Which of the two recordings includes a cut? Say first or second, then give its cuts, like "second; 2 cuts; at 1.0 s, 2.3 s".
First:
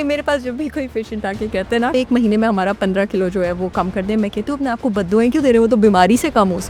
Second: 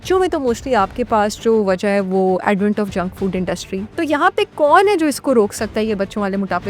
second; 1 cut; at 3.9 s